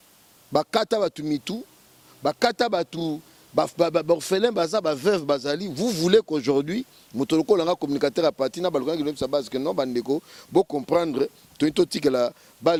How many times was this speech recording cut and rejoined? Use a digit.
0